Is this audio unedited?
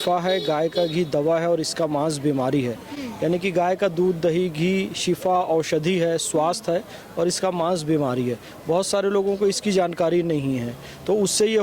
yes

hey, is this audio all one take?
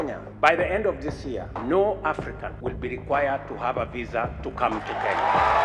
yes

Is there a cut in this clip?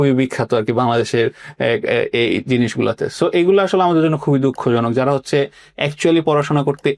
no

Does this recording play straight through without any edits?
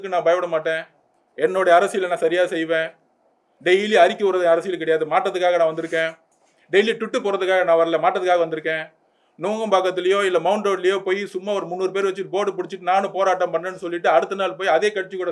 yes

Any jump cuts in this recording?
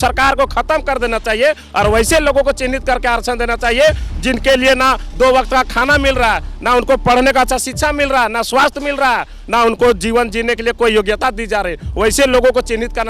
no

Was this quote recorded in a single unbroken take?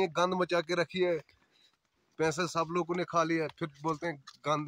yes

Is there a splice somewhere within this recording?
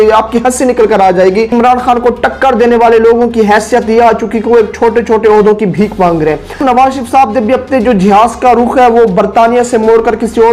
yes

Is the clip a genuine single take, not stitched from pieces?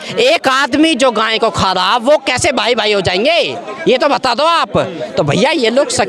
yes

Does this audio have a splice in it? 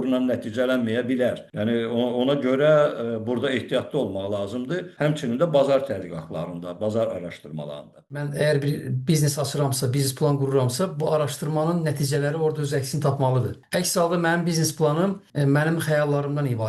yes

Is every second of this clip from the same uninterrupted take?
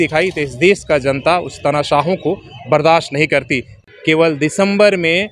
no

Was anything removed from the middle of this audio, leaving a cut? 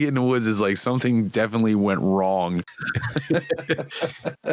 yes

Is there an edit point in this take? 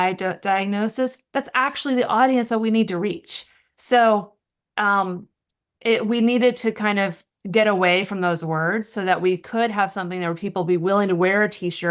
no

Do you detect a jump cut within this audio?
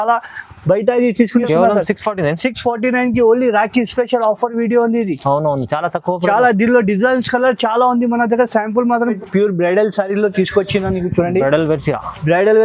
yes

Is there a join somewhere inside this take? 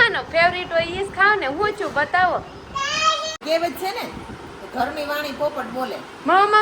yes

